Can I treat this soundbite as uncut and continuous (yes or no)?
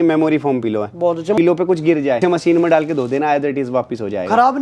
no